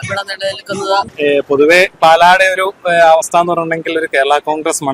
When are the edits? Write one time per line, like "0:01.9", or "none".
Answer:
0:01.1

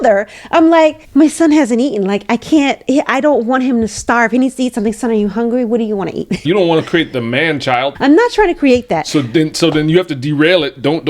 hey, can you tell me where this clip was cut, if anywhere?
0:01.0
0:06.4
0:07.9

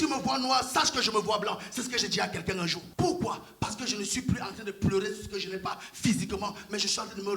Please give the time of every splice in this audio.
0:02.8

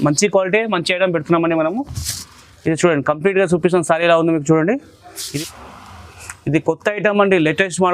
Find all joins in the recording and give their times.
0:05.2

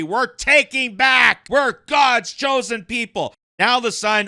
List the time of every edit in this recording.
0:01.4
0:03.4

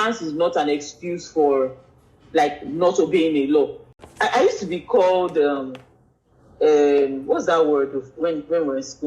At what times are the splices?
0:03.9

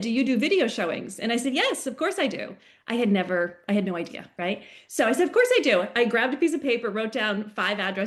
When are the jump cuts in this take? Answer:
none

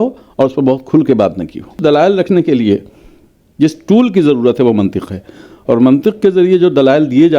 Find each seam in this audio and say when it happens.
0:01.8

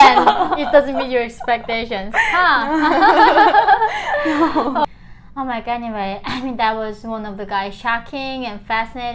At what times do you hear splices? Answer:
0:04.9

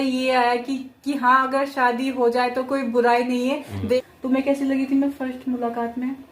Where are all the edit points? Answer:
0:04.0

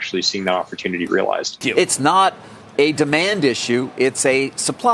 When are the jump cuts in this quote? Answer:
0:01.6

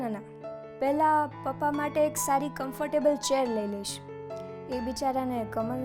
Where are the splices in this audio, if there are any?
none

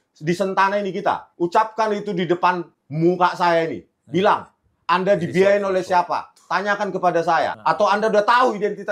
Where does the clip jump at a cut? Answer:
0:01.3

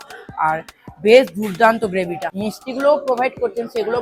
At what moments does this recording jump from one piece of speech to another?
0:02.4

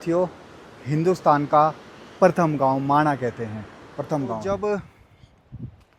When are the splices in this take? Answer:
0:04.4

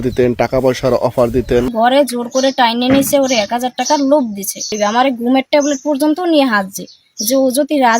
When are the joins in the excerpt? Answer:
0:01.7
0:05.0

